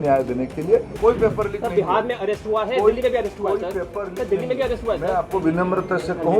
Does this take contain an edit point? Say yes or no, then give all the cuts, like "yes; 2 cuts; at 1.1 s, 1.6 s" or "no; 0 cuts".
yes; 1 cut; at 1.0 s